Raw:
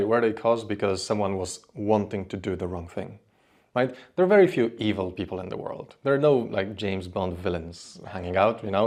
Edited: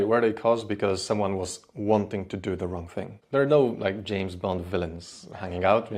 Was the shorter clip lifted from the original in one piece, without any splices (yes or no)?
no